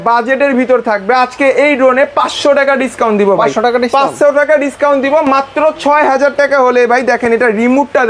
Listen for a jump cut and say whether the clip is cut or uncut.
uncut